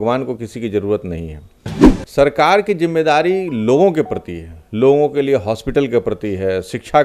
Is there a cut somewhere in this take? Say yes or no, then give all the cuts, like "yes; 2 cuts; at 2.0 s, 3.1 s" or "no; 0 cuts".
no; 0 cuts